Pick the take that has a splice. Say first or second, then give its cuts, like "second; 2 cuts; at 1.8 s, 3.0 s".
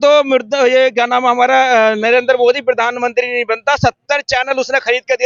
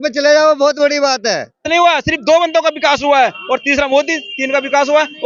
second; 1 cut; at 1.7 s